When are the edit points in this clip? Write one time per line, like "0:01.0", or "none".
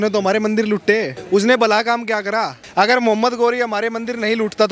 0:01.1
0:02.6

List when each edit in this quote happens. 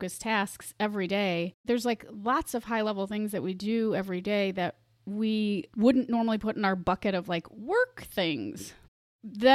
0:01.6
0:05.7

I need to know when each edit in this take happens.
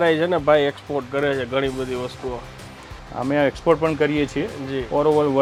none

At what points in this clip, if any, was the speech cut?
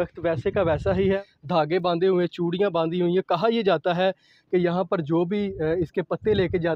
0:01.2

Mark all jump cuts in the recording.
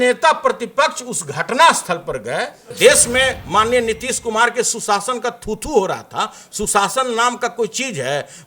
0:02.7

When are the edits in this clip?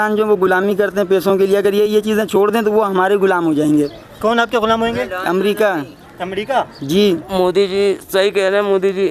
0:07.3

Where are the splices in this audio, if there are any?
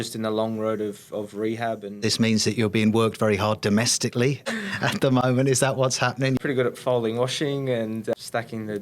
0:02.0
0:04.5
0:06.4
0:08.1

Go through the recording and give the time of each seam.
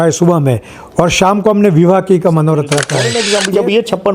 0:03.2

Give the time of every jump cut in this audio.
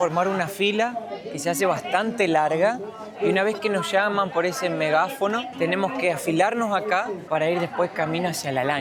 none

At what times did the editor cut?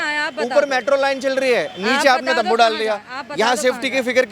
none

